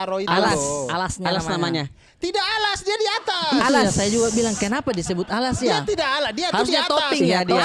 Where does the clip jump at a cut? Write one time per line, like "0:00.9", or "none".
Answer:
none